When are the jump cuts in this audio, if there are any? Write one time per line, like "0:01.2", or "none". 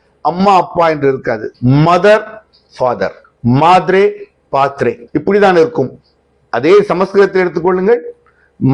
0:01.5
0:03.3
0:05.0